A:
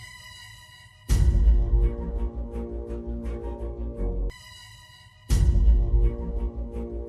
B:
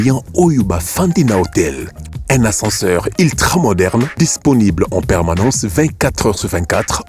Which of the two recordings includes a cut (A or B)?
A